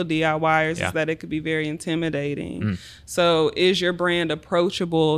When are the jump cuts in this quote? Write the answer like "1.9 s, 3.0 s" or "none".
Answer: none